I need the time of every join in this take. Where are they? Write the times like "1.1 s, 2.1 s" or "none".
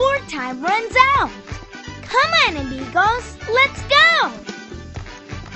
4.4 s

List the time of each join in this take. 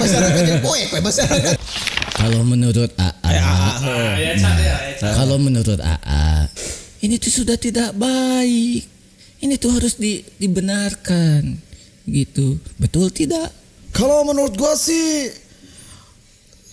1.6 s, 13.6 s

